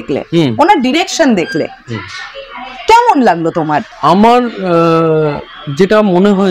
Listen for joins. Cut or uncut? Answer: cut